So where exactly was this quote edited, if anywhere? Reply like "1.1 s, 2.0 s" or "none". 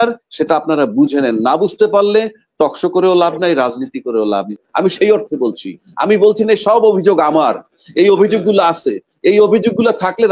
4.6 s